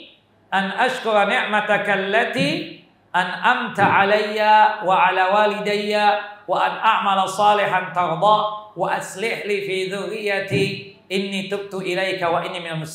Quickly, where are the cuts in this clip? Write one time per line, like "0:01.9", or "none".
none